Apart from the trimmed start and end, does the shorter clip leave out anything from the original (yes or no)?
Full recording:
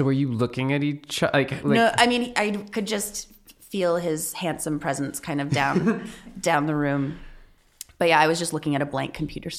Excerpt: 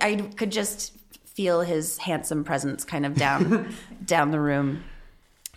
no